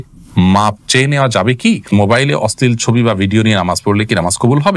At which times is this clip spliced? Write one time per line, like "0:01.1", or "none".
0:01.9